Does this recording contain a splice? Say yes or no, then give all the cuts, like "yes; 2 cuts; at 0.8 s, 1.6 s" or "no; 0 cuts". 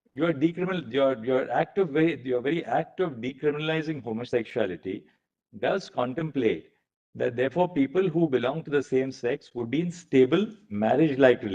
no; 0 cuts